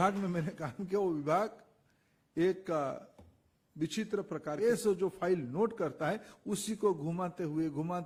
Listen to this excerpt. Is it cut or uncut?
uncut